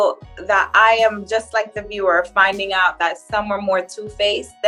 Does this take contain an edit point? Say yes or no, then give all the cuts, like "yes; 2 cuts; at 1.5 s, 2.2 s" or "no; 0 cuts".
no; 0 cuts